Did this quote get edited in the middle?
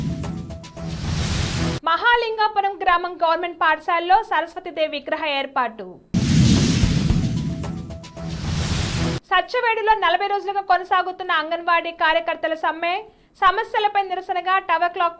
yes; 1 cut; at 1.8 s

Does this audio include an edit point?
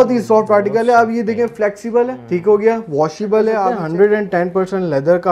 yes; 2 cuts; at 2.2 s, 3.8 s

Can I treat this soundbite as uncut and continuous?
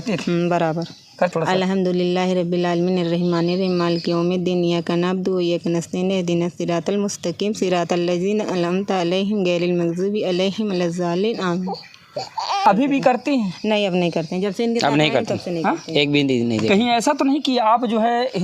no; 2 cuts; at 1.3 s, 12.6 s

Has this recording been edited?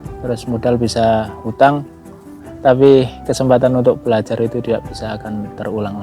yes; 1 cut; at 2.4 s

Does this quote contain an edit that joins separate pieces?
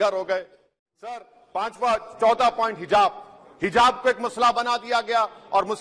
yes; 1 cut; at 1.2 s

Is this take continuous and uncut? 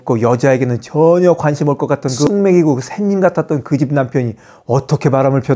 no; 1 cut; at 2.3 s

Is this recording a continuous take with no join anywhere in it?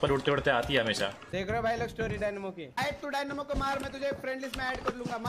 no; 2 cuts; at 1.2 s, 2.8 s

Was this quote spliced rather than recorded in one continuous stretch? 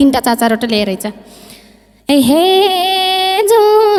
no; 0 cuts

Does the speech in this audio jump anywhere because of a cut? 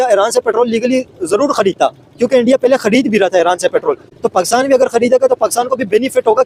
no; 0 cuts

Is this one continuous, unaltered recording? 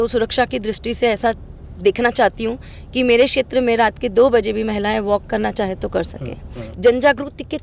no; 1 cut; at 6.7 s

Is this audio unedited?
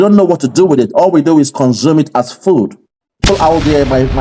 no; 1 cut; at 3.2 s

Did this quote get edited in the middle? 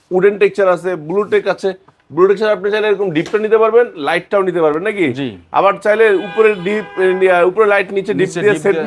no; 0 cuts

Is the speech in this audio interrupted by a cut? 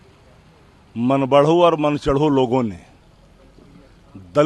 no; 0 cuts

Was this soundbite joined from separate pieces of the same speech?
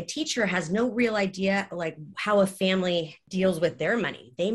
yes; 1 cut; at 3.2 s

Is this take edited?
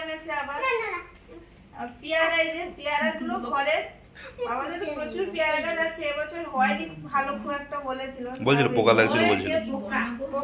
no; 0 cuts

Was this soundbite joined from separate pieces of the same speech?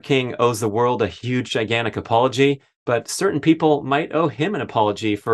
no; 0 cuts

